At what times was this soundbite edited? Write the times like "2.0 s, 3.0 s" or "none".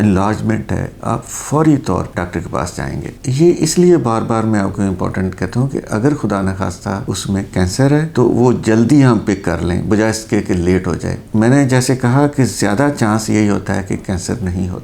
none